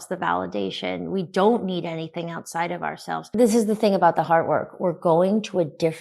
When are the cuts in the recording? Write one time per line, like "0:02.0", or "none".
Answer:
0:03.3

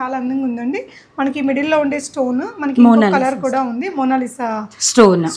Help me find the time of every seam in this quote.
none

